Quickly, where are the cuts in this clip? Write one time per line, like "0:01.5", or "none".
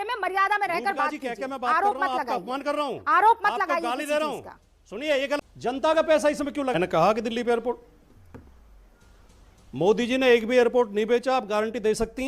0:05.4

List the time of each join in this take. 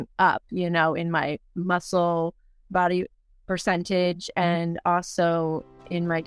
0:02.6

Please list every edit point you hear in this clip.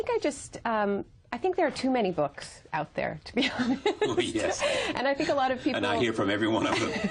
0:03.8

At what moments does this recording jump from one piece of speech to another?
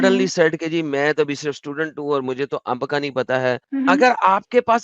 0:03.6

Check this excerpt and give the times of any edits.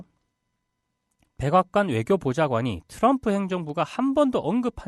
none

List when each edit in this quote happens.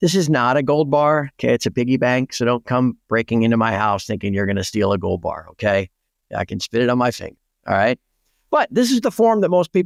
none

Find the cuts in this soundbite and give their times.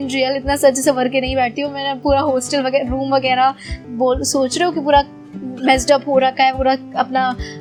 none

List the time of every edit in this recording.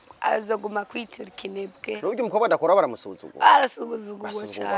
0:02.0

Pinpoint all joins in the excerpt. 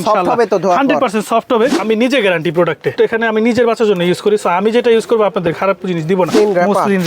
0:01.8
0:06.3

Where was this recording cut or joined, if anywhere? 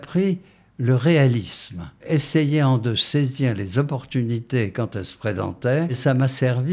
0:02.0
0:06.0

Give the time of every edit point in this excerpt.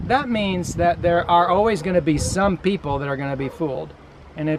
none

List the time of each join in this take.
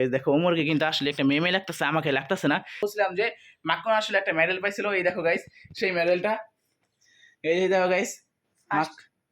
0:02.8

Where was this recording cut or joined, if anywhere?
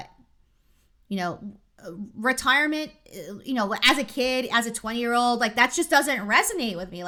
none

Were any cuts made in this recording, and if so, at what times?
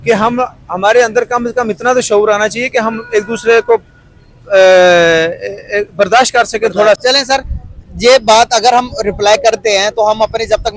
0:07.0

